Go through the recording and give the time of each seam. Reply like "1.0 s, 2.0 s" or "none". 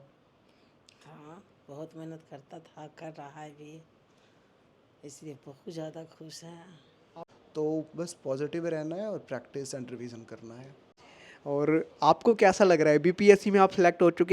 7.2 s, 10.9 s